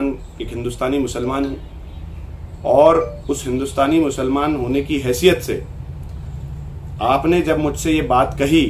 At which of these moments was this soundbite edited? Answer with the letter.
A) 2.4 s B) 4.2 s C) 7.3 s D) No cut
D